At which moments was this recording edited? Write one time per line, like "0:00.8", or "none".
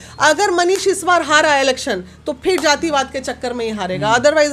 none

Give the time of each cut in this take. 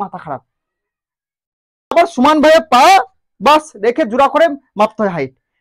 0:01.9

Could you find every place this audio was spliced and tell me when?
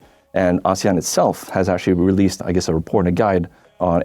none

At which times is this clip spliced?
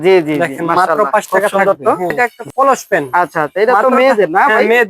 0:02.4

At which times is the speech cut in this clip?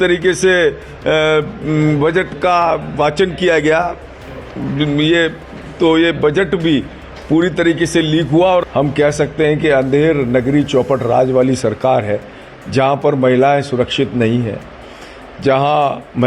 0:08.6

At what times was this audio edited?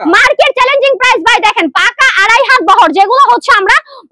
none

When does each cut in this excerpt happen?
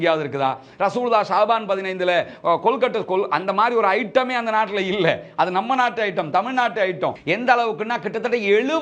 0:07.2

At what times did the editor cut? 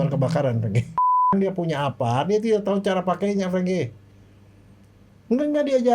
0:01.3

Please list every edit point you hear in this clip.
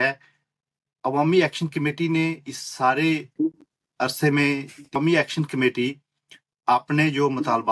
0:05.0

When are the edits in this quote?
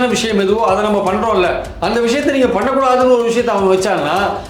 none

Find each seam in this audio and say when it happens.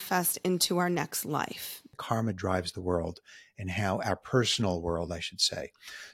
0:01.9

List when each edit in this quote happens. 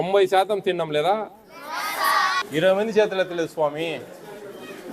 0:02.4

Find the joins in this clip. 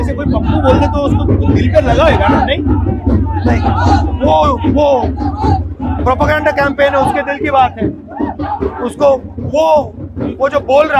none

